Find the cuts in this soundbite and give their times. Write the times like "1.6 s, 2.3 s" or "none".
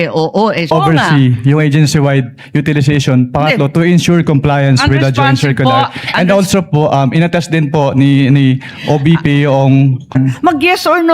0.7 s, 10.1 s